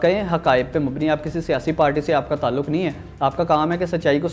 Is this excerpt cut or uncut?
uncut